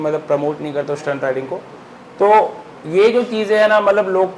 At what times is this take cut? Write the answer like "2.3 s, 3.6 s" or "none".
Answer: none